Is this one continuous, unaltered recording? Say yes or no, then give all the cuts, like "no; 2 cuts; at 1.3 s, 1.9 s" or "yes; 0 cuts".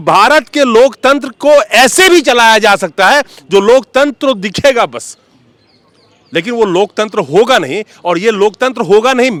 yes; 0 cuts